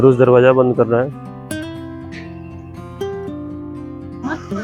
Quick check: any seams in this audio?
no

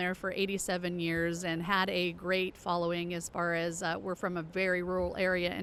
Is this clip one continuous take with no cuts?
yes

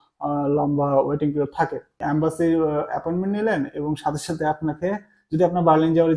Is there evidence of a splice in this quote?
yes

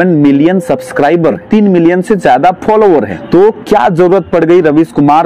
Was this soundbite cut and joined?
yes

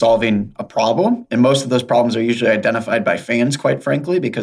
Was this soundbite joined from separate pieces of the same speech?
no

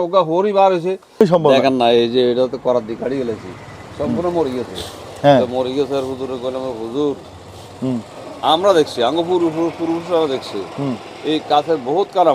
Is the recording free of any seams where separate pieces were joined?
no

